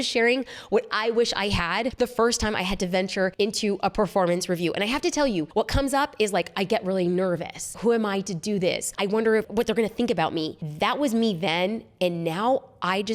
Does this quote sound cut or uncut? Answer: cut